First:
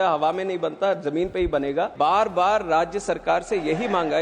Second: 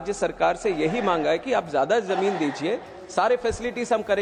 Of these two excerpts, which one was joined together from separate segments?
first; 1 cut; at 1.9 s

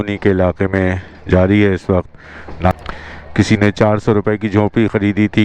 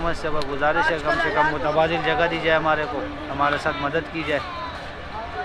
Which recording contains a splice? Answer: first; 1 cut; at 2.7 s

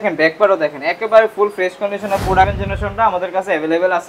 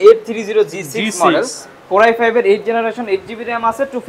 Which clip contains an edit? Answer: first; 1 cut; at 2.6 s

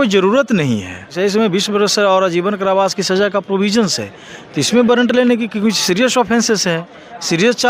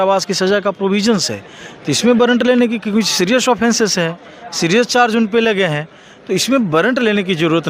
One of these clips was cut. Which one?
first; 1 cut; at 1.1 s

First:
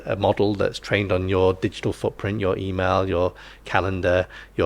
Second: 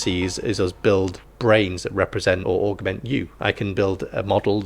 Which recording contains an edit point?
second; 2 cuts; at 1.2 s, 2.4 s

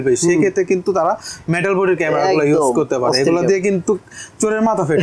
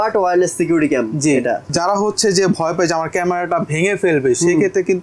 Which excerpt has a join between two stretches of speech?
second; 1 cut; at 1.7 s

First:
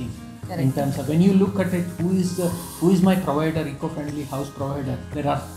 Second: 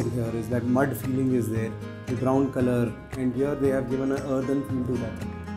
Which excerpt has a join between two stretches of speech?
second; 1 cut; at 3.3 s

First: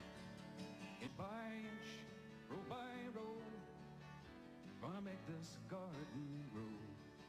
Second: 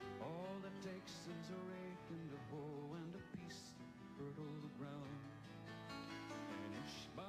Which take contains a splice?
first; 1 cut; at 3.0 s

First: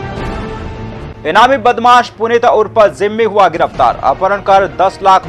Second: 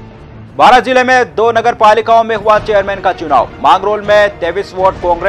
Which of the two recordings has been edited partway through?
first; 1 cut; at 1.1 s

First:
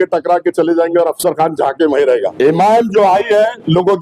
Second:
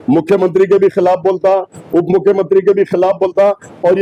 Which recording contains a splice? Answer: first; 1 cut; at 2.3 s

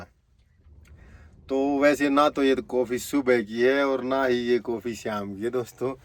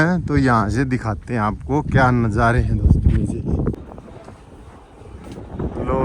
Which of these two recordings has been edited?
second; 1 cut; at 3.8 s

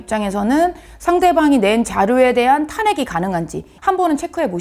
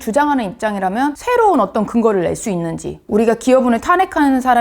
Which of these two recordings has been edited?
second; 2 cuts; at 1.2 s, 3.0 s

